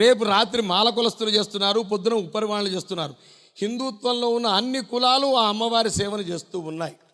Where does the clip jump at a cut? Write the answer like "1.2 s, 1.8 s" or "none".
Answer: none